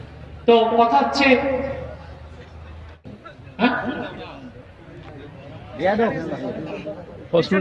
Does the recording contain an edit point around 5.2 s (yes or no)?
no